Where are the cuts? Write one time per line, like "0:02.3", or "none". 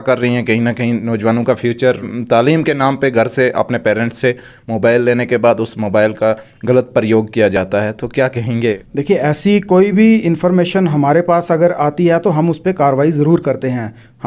none